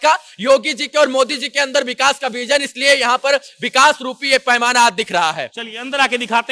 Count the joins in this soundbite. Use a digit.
0